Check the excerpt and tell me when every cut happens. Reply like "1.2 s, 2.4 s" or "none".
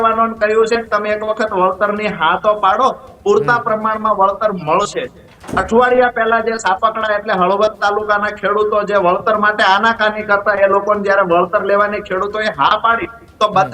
none

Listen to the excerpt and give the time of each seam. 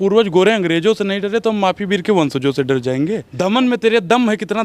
3.3 s

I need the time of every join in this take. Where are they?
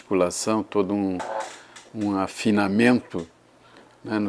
none

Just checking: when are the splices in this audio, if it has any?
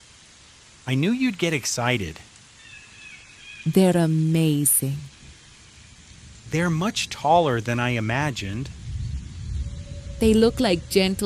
none

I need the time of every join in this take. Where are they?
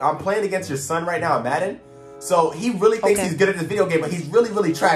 none

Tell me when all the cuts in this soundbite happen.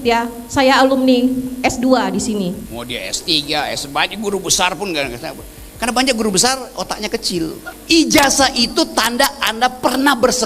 2.7 s, 7.7 s

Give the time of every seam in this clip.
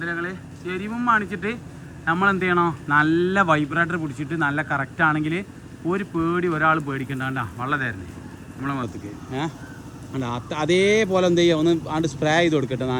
none

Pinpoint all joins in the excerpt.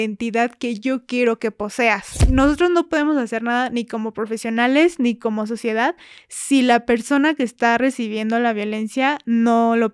2.2 s

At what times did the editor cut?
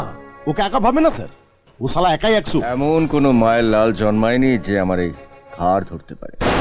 2.7 s

